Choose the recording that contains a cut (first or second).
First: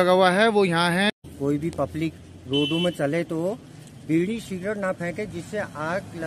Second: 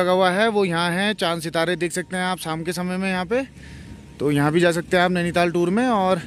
first